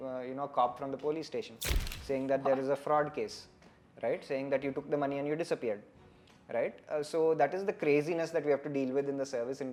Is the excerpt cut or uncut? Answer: uncut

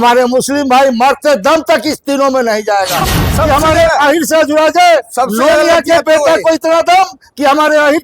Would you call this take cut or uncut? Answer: cut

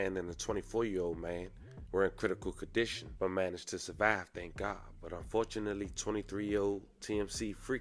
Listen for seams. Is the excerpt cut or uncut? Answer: uncut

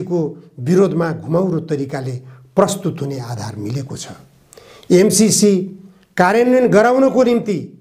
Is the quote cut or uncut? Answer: uncut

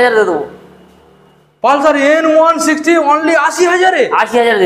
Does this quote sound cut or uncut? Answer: uncut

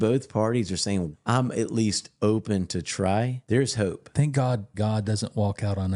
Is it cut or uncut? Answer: cut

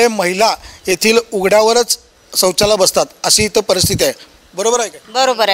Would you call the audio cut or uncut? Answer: uncut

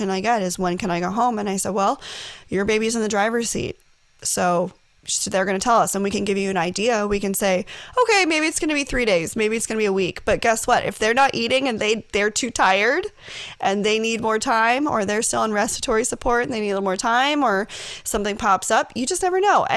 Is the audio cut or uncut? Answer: uncut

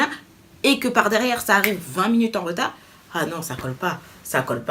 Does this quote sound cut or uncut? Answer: uncut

